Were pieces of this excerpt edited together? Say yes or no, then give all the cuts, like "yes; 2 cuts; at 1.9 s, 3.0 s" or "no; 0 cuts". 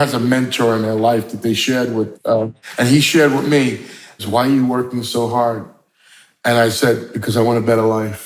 yes; 2 cuts; at 2.6 s, 4.1 s